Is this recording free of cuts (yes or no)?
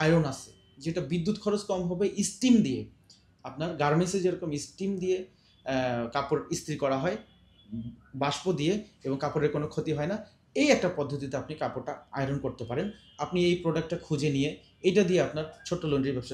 yes